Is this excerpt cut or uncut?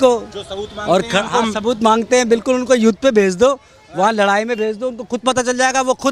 uncut